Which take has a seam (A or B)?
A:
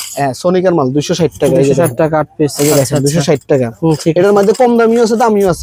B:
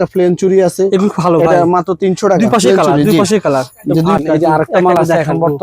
B